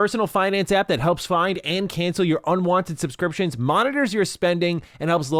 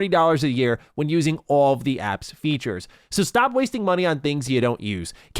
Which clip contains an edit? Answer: second; 1 cut; at 2.9 s

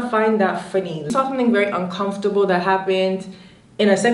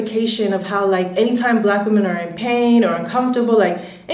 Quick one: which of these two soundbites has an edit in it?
first; 1 cut; at 1.1 s

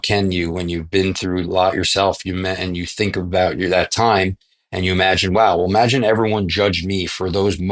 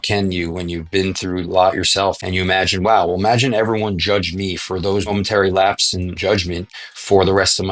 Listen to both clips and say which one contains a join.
second; 3 cuts; at 2.2 s, 5.1 s, 6.1 s

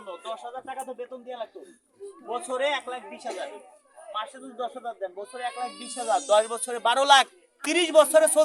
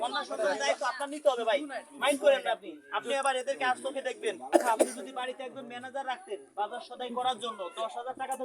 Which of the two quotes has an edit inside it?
second; 1 cut; at 4.4 s

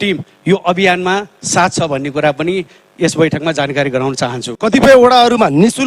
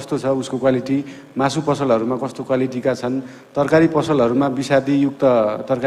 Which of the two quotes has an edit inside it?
first; 1 cut; at 4.6 s

